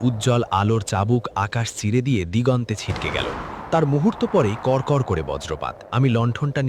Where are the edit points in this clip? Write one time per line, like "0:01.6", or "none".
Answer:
0:05.8